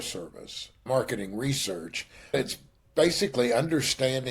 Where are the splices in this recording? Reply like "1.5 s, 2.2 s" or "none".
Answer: 0.8 s, 2.3 s

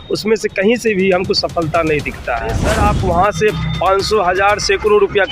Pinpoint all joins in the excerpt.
2.7 s

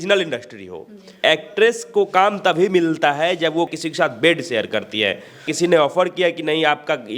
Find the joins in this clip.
1.2 s, 3.7 s, 5.5 s

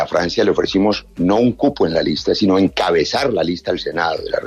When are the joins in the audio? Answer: none

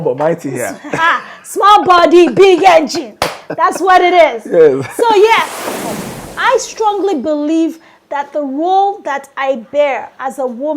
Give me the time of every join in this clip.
5.8 s

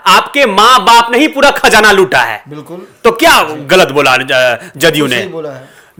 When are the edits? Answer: none

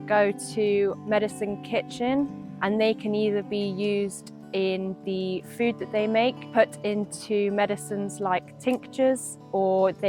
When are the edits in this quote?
1.0 s

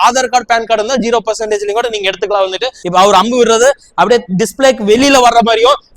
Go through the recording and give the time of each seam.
2.8 s

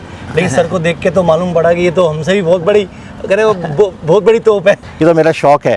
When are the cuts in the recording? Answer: 4.8 s

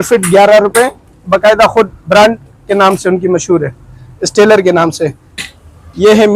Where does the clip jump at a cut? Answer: 1.0 s, 5.4 s

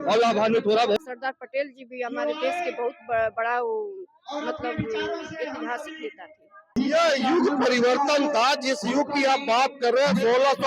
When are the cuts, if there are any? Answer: 1.0 s, 6.7 s

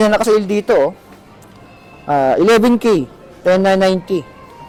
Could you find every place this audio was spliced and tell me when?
none

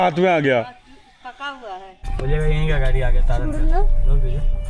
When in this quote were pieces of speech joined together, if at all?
2.0 s

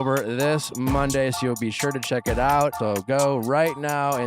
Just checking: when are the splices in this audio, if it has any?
2.8 s

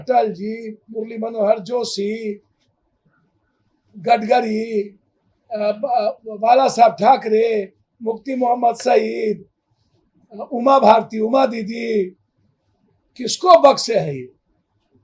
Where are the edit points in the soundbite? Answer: none

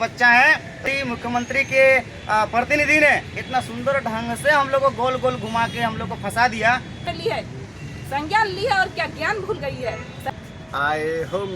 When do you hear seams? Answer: 0.9 s, 7.0 s, 10.3 s

